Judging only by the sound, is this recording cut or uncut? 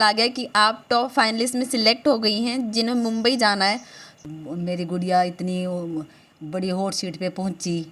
cut